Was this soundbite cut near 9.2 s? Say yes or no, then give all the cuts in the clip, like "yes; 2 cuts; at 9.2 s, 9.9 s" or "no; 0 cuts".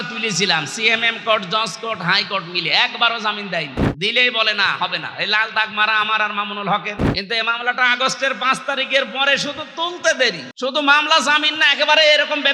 no; 3 cuts; at 3.8 s, 7.0 s, 10.5 s